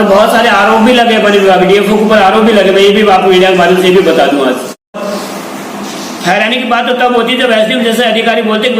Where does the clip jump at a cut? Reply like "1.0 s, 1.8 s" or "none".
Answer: 4.9 s